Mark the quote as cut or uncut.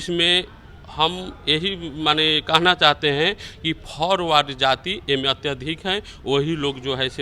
uncut